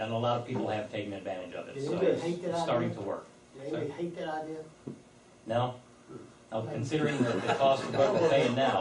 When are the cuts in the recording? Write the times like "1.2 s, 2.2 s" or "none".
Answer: 1.7 s